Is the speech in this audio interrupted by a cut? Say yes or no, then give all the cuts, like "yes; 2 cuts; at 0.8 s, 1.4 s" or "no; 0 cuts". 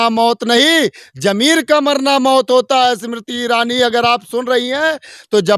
no; 0 cuts